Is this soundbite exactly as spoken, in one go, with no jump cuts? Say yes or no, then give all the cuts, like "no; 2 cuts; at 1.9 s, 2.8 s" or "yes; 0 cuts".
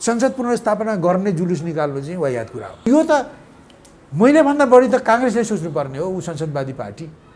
no; 1 cut; at 2.9 s